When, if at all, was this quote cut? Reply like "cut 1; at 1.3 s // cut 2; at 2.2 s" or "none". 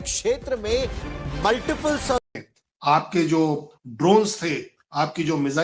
none

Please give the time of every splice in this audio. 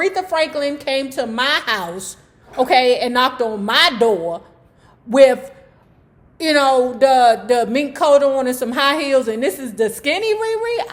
none

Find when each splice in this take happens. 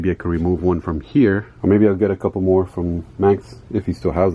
cut 1; at 1.5 s

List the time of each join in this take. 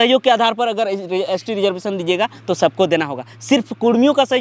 none

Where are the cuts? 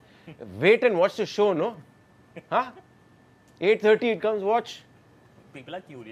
none

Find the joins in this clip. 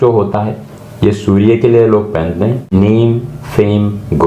cut 1; at 2.7 s

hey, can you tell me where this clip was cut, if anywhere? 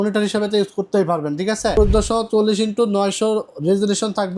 cut 1; at 1.8 s

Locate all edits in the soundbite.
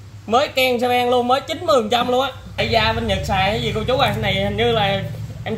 cut 1; at 2.6 s

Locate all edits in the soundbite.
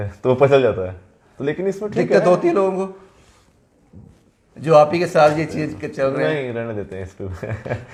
none

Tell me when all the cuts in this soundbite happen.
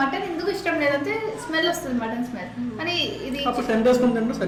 none

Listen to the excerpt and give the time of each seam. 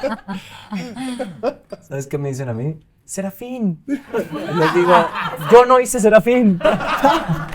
cut 1; at 1.9 s

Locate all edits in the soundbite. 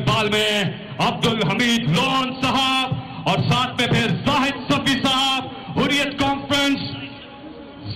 none

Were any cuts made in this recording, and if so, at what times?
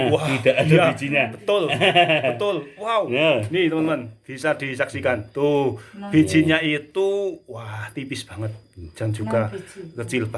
none

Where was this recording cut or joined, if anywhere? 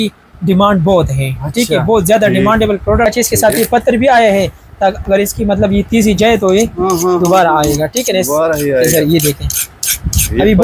cut 1; at 3.1 s

